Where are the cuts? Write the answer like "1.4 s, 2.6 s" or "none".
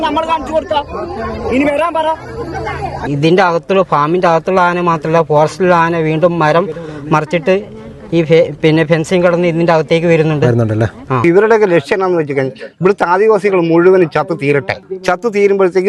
3.1 s, 11.2 s, 14.8 s